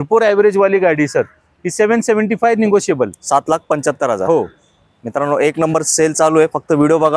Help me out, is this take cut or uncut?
uncut